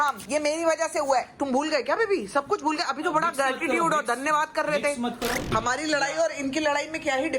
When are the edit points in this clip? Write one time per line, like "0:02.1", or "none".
0:05.5

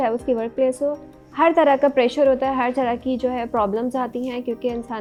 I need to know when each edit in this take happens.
none

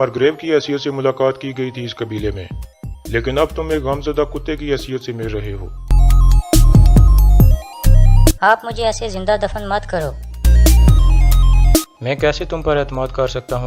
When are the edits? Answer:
0:07.2

